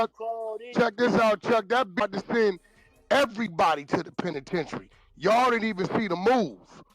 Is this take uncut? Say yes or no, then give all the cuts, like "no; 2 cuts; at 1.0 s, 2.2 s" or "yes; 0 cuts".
no; 1 cut; at 0.9 s